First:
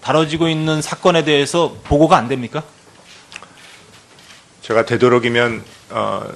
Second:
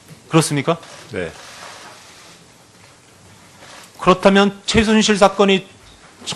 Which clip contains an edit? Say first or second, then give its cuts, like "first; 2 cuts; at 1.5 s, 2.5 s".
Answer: first; 1 cut; at 2.6 s